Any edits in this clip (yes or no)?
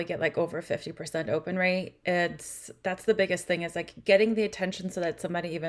no